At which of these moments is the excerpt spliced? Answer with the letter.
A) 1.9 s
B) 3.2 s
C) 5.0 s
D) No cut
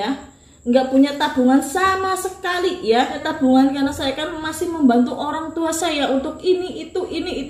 B